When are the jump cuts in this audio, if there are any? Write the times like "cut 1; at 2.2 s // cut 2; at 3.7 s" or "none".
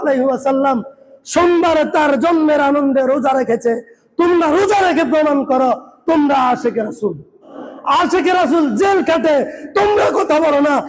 cut 1; at 7.4 s

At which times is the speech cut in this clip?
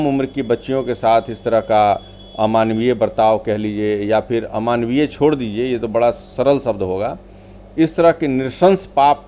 none

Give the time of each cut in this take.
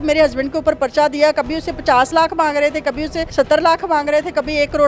cut 1; at 3.2 s

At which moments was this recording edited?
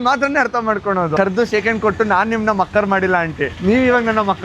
cut 1; at 1.2 s

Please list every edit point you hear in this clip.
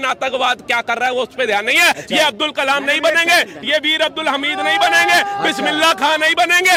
none

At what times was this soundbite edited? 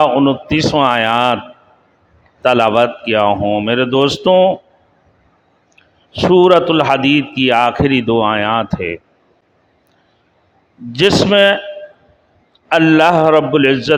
none

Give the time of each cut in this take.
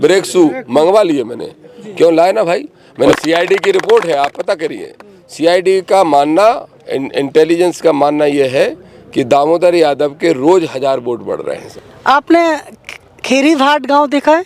cut 1; at 3.1 s // cut 2; at 11.6 s

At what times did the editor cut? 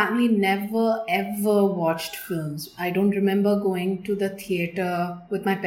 none

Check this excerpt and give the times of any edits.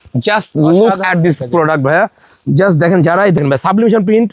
cut 1; at 3.4 s

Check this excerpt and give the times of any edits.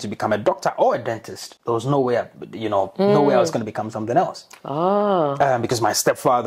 none

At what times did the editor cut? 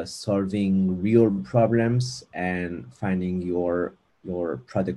none

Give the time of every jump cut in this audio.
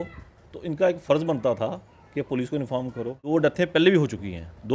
cut 1; at 3.3 s

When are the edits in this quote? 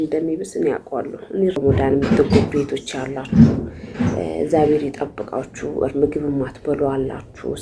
cut 1; at 1.6 s

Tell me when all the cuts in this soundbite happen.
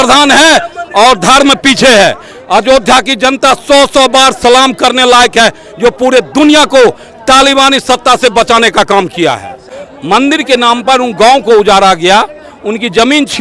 cut 1; at 9.7 s

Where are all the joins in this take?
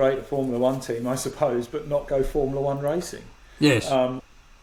none

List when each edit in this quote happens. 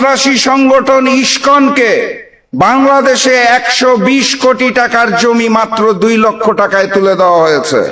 none

